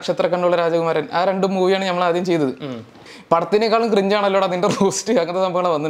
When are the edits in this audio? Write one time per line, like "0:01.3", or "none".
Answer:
0:03.1